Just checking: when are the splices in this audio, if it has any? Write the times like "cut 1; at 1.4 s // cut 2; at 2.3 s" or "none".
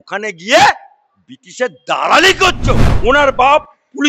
cut 1; at 2.9 s